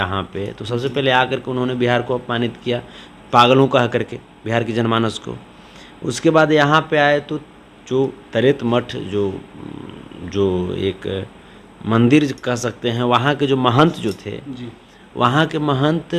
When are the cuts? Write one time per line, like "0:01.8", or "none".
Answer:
none